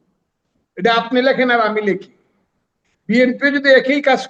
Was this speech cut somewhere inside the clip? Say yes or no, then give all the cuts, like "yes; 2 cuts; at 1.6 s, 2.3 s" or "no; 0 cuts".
no; 0 cuts